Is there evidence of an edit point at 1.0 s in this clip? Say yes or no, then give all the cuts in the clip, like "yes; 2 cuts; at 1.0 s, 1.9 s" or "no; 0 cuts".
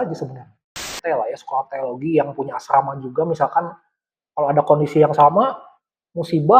yes; 1 cut; at 1.0 s